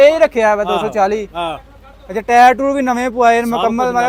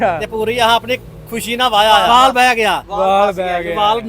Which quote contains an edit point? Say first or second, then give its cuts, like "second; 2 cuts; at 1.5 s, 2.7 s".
second; 1 cut; at 2.1 s